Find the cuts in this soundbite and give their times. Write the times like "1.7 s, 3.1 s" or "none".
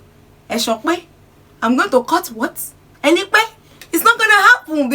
none